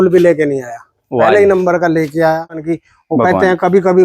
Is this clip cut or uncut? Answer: cut